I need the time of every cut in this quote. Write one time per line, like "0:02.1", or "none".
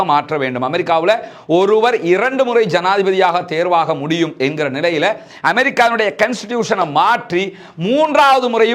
none